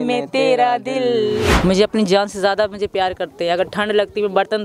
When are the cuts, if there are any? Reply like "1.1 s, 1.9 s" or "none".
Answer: 1.6 s